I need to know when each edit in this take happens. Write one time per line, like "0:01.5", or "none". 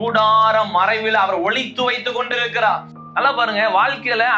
0:02.9